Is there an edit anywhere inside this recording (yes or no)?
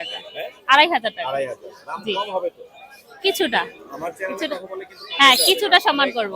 no